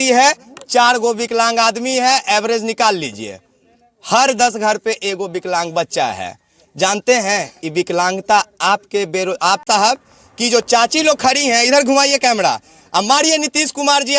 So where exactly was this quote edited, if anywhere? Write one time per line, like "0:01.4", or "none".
0:09.6